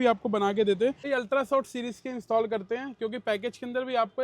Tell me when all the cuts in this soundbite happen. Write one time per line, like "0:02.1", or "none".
0:01.1